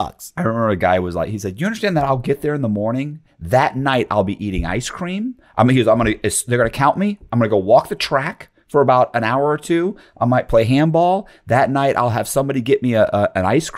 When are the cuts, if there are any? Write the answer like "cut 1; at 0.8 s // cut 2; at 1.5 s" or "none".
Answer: none

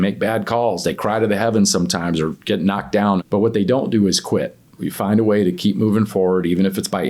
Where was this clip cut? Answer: cut 1; at 3.2 s // cut 2; at 4.8 s

